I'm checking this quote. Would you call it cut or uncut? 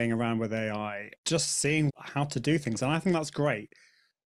cut